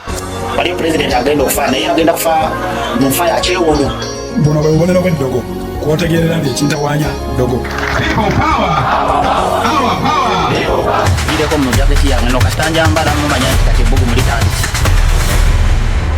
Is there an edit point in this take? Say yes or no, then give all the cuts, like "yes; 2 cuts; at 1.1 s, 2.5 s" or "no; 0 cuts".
no; 0 cuts